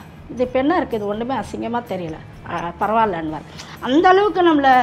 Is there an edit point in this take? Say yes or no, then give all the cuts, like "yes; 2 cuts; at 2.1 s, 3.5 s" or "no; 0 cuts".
no; 0 cuts